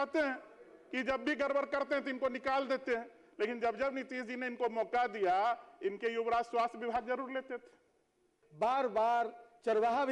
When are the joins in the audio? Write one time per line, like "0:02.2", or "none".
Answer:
0:08.4